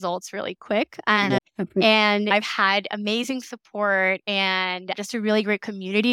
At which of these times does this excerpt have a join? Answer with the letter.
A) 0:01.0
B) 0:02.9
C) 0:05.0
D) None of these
C